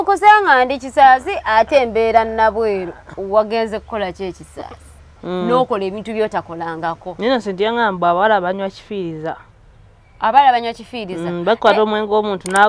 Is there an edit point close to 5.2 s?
yes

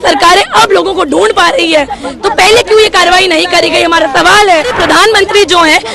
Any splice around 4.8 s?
yes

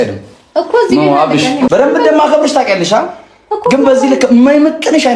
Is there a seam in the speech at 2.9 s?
no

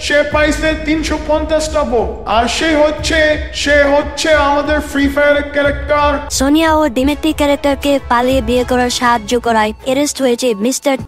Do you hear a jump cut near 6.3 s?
yes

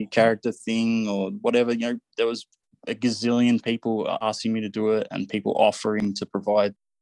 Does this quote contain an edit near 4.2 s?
yes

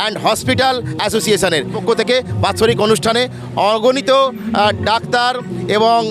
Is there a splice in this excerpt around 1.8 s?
yes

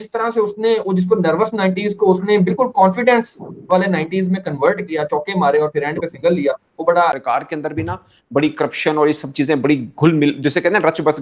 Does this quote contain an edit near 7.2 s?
yes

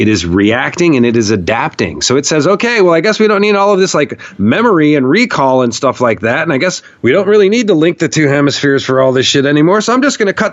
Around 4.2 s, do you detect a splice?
no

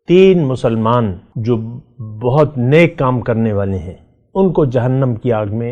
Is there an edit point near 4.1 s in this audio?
no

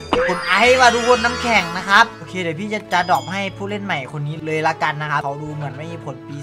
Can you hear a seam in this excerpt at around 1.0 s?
no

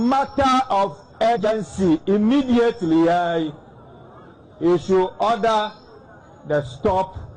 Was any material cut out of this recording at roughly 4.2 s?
no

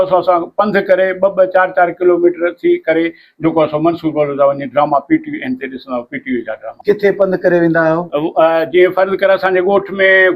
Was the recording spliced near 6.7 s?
yes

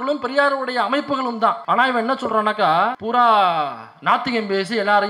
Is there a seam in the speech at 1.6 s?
yes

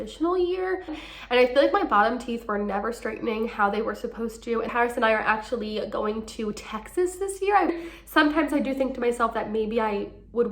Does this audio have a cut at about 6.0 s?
no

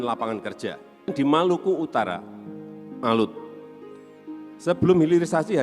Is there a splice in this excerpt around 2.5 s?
no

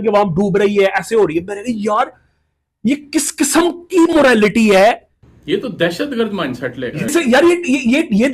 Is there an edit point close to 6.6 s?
no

